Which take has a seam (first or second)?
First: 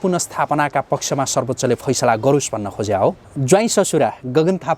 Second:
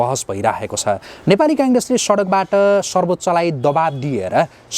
first